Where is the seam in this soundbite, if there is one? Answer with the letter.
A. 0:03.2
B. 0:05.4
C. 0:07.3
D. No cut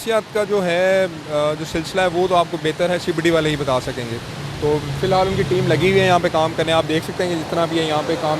D